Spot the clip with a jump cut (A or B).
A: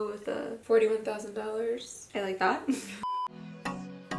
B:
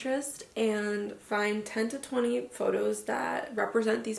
A